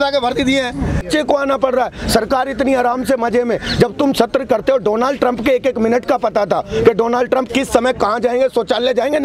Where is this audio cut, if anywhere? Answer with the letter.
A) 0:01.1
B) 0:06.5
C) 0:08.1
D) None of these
A